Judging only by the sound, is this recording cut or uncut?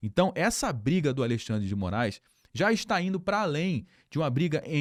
uncut